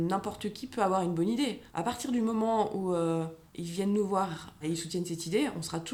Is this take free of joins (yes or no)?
yes